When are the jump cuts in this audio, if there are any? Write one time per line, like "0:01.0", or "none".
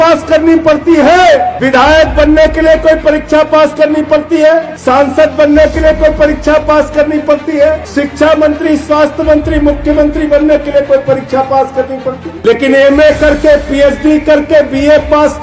0:01.5
0:04.7
0:07.8
0:12.3

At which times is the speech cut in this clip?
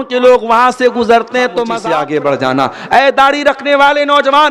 0:01.7

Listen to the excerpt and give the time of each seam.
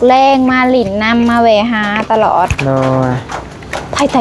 0:02.6

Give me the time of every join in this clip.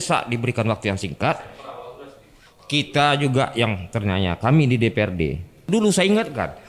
0:05.6

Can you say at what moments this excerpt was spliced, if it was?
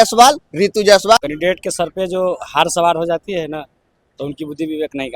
0:01.2

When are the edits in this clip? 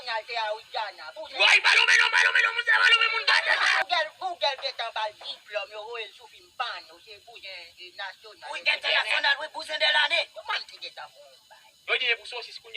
0:03.7
0:10.4

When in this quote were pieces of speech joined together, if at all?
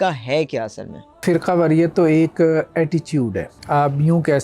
0:01.2
0:03.5

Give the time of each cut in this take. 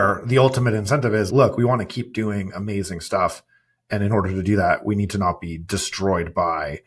none

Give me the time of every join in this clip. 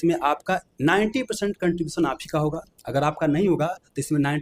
none

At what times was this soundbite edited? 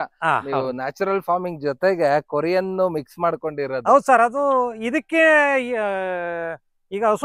none

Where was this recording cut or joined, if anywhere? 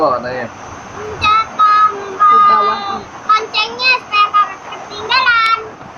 none

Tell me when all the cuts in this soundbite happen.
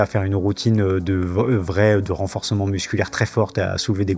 none

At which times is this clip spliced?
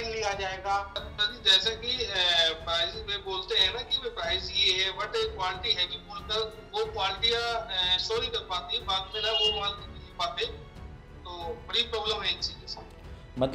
0:01.0

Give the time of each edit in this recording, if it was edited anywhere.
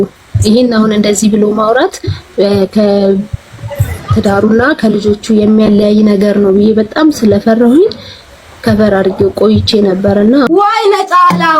0:10.5

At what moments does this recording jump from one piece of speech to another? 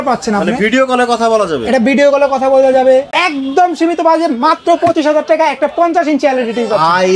0:03.2

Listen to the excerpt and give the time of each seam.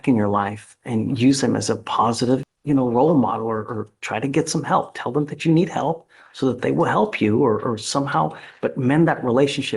0:02.5

